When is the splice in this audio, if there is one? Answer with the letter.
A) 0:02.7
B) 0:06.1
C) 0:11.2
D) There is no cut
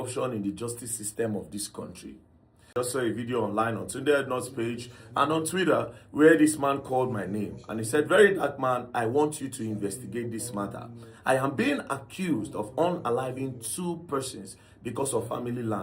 A